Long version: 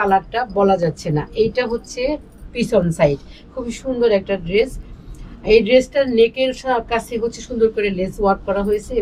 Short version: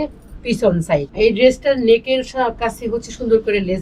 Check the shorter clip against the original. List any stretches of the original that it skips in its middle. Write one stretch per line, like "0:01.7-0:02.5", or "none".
0:03.2-0:05.4